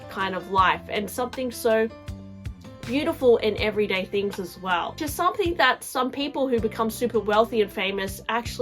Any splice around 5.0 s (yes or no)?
yes